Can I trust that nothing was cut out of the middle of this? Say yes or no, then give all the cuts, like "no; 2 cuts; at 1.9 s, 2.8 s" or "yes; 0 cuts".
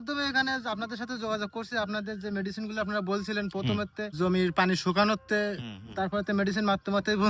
no; 1 cut; at 4.1 s